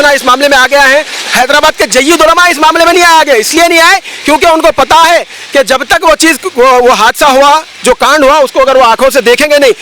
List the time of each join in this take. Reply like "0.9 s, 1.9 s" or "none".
none